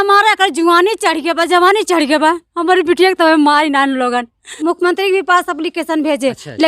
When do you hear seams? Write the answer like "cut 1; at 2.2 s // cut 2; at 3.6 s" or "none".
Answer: cut 1; at 4.4 s